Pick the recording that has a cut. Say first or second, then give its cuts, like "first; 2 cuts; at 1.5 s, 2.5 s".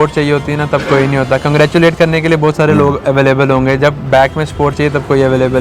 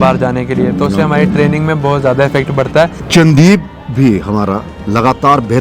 second; 1 cut; at 3.0 s